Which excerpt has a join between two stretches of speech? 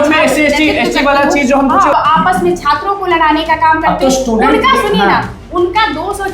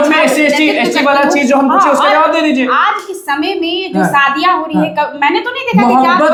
first; 1 cut; at 1.9 s

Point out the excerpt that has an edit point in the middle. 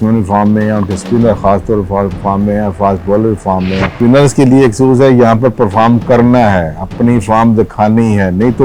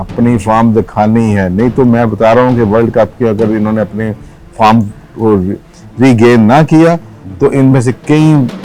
first; 1 cut; at 3.9 s

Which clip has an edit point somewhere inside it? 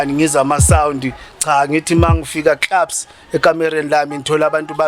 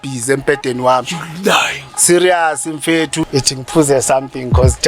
second; 1 cut; at 3.2 s

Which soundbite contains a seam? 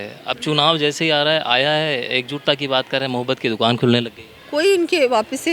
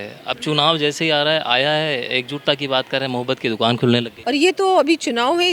second; 1 cut; at 4.1 s

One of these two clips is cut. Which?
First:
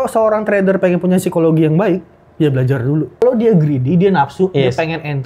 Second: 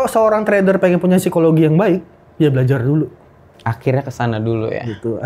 first; 1 cut; at 3.2 s

